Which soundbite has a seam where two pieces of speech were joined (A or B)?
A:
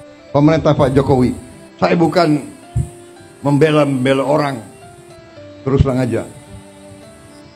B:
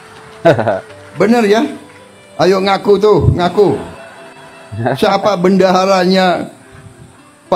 B